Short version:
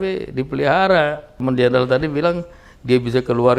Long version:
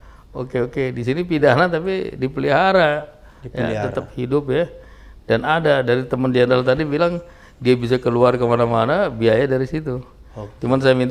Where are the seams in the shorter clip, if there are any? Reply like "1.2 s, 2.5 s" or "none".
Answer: 1.4 s